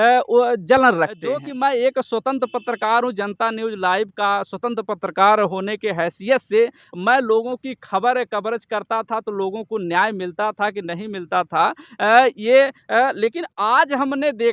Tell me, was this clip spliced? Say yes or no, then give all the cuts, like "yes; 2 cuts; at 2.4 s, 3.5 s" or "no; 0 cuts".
yes; 1 cut; at 1.5 s